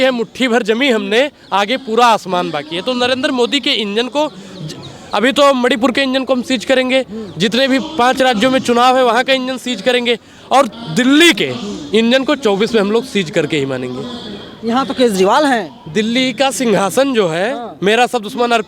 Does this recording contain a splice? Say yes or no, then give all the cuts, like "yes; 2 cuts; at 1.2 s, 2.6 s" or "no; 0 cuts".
no; 0 cuts